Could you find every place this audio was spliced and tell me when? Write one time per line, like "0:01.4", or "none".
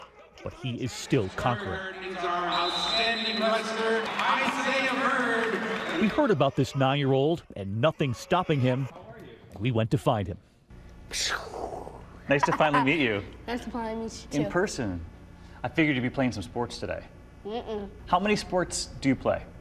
0:04.8